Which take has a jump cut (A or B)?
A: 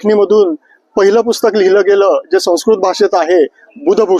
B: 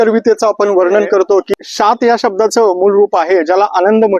B